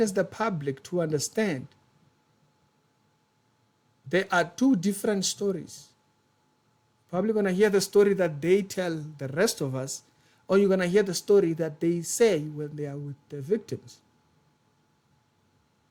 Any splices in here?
no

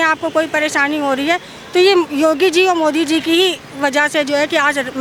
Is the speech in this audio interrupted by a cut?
no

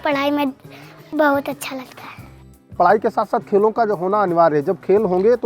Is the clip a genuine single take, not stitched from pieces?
no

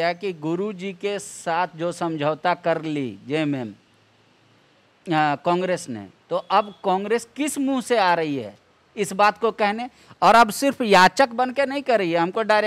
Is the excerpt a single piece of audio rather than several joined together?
yes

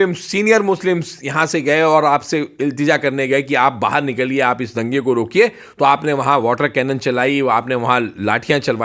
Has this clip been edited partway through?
no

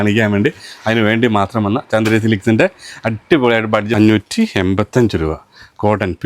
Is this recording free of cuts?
no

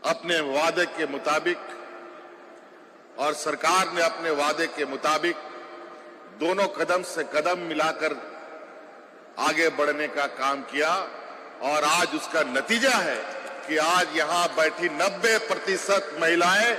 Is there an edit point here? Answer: no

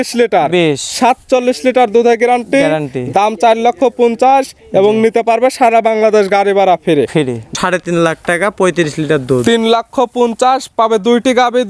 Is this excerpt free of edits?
no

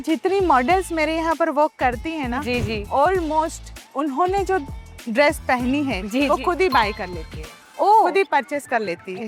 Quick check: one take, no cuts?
yes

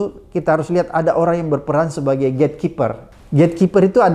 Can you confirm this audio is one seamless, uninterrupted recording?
no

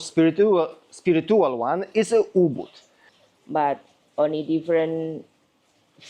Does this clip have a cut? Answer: yes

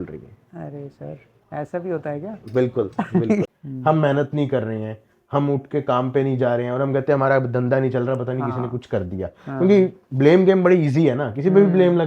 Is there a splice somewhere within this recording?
yes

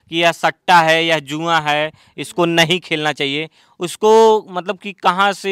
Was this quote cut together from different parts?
no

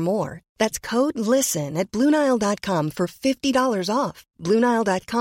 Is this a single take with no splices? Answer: yes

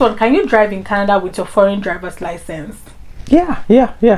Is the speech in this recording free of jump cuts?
yes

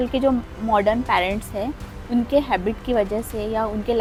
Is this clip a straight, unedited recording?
yes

